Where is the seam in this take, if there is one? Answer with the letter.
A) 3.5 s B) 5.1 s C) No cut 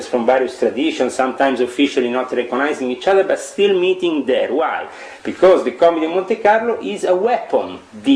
C